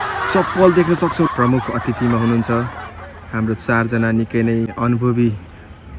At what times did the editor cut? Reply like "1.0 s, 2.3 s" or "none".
1.3 s, 4.7 s